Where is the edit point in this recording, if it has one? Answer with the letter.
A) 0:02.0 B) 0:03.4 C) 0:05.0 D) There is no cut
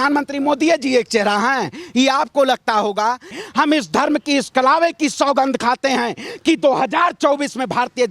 B